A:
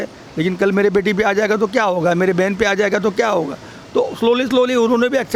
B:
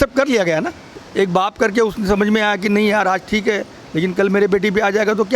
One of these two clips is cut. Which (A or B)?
B